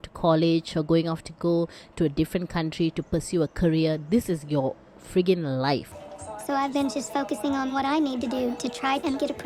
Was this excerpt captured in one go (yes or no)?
yes